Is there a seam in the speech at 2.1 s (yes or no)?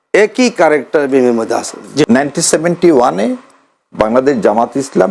yes